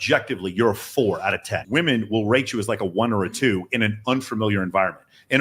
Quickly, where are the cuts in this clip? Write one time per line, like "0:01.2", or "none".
0:01.6

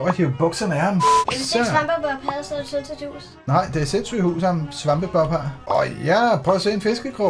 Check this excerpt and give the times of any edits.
0:01.2
0:05.5

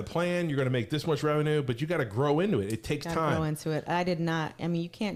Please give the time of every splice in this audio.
none

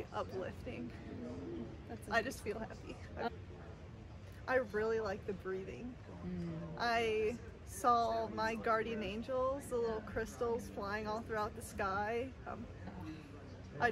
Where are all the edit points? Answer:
none

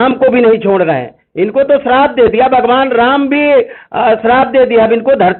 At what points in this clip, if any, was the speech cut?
none

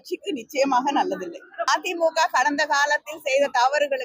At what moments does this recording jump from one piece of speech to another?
0:01.7

